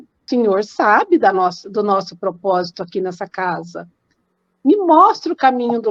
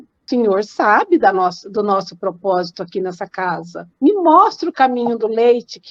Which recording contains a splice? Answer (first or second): second